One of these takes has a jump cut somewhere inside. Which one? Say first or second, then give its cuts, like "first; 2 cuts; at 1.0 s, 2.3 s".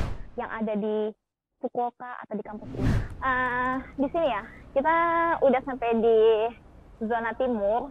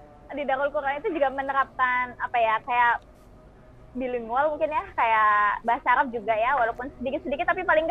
first; 1 cut; at 2.8 s